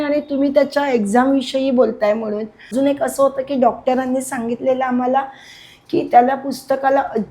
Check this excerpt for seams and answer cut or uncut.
cut